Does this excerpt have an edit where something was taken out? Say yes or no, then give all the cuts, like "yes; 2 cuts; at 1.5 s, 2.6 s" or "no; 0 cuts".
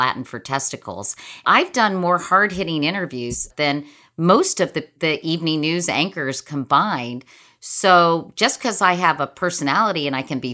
yes; 3 cuts; at 1.4 s, 3.5 s, 4.9 s